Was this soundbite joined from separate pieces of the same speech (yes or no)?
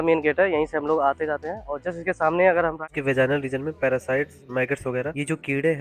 yes